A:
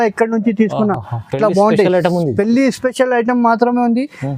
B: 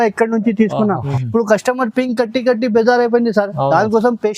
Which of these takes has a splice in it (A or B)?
B